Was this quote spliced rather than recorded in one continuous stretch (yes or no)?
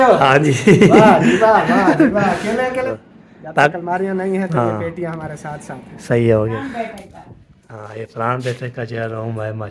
yes